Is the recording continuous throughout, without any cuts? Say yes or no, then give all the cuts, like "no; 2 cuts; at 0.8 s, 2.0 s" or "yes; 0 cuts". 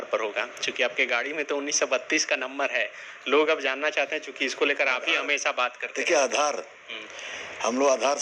yes; 0 cuts